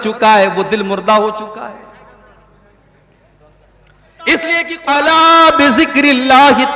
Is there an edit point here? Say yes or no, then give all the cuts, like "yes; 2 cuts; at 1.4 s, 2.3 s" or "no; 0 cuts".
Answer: yes; 1 cut; at 4.7 s